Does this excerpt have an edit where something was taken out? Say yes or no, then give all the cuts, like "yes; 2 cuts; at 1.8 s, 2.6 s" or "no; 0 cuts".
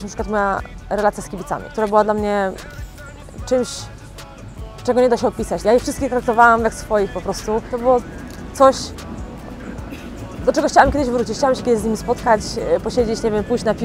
yes; 3 cuts; at 1.7 s, 5.6 s, 7.7 s